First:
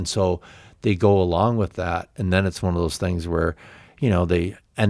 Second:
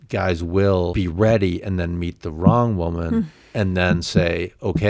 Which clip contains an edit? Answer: second; 1 cut; at 0.9 s

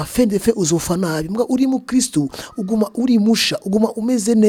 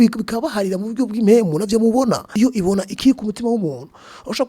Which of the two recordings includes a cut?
second; 1 cut; at 2.3 s

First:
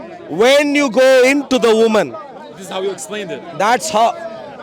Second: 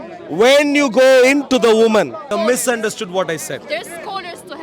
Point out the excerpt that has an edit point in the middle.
second; 1 cut; at 2.3 s

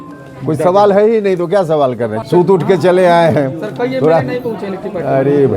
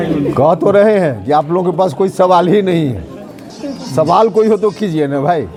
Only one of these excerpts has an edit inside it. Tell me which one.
first; 1 cut; at 2.2 s

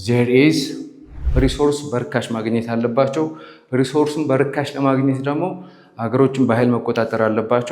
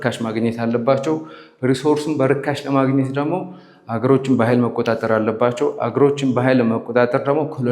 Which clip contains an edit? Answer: first; 1 cut; at 1.1 s

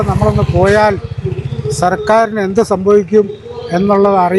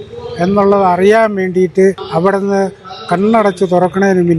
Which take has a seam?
second; 1 cut; at 2.0 s

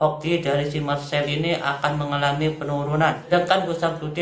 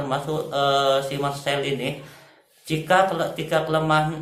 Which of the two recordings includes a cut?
first; 1 cut; at 3.3 s

